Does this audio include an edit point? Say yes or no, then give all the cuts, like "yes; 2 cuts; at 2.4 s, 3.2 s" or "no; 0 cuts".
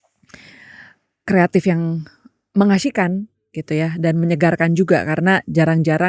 no; 0 cuts